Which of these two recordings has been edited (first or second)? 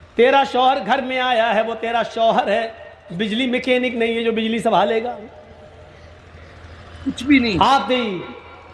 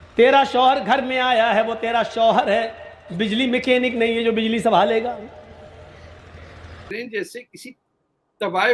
second